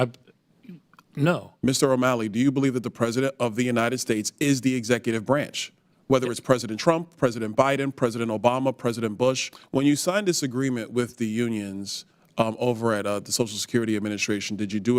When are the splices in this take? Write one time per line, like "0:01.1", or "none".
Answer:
0:01.5
0:09.5